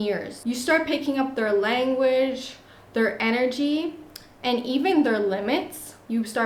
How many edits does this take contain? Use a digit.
0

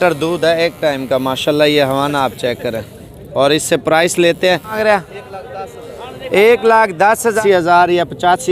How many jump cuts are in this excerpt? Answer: 2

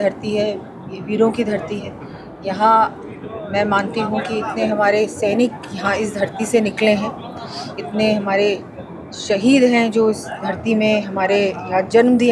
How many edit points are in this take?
0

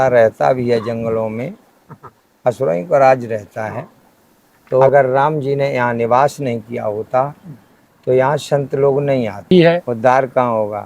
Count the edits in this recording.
2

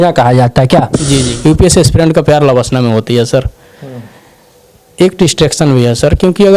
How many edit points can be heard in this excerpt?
1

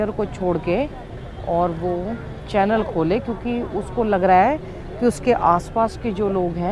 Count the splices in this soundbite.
0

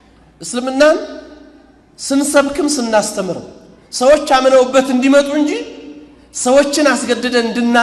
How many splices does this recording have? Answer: 0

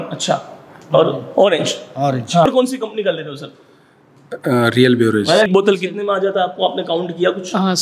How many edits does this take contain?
2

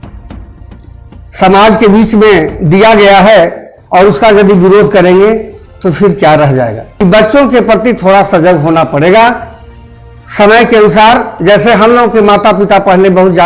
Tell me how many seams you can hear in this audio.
1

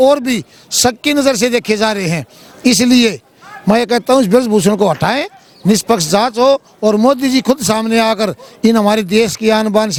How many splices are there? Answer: 0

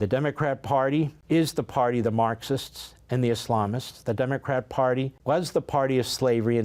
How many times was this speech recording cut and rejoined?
2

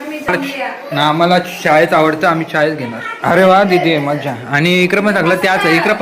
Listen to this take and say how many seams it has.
1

